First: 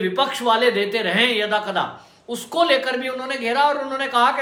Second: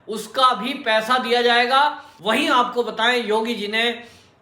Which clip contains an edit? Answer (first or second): second